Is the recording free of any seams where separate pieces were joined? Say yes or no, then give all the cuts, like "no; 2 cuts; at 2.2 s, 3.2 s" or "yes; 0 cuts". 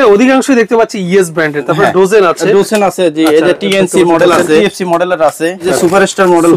no; 2 cuts; at 4.6 s, 5.7 s